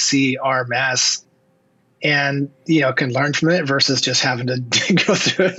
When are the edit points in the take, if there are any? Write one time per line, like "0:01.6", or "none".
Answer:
none